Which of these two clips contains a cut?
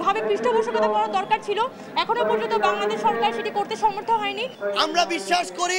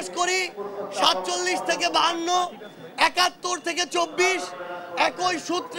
first; 1 cut; at 4.5 s

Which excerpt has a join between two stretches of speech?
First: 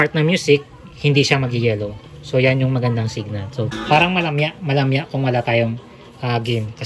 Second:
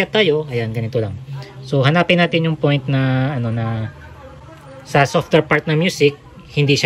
first; 1 cut; at 3.8 s

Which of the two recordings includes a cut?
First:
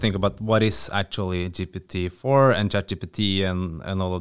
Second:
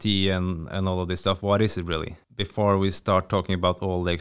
second; 1 cut; at 2.2 s

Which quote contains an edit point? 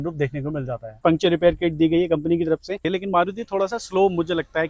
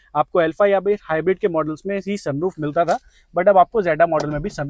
first; 2 cuts; at 1.0 s, 2.9 s

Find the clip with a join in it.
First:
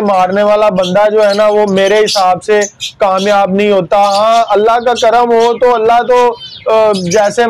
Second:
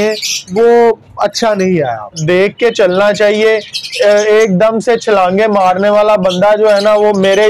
second; 1 cut; at 2.2 s

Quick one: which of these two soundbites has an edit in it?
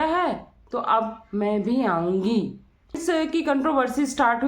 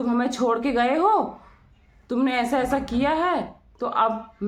first; 1 cut; at 3.0 s

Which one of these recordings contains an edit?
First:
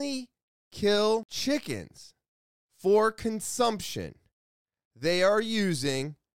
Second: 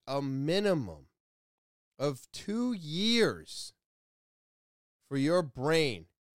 first; 1 cut; at 1.3 s

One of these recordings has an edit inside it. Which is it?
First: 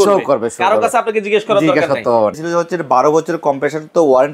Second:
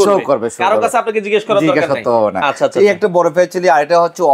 first; 1 cut; at 2.4 s

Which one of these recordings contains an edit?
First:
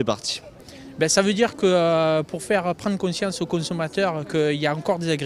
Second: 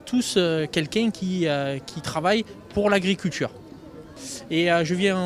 first; 1 cut; at 3.1 s

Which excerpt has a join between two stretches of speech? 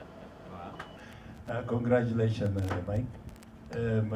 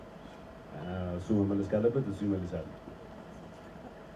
first; 1 cut; at 0.9 s

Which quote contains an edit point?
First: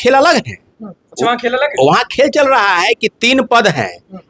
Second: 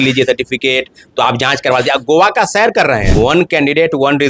second; 1 cut; at 3.1 s

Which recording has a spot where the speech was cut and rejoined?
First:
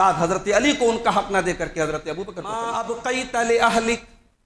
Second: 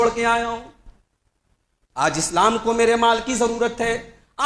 first; 1 cut; at 2.6 s

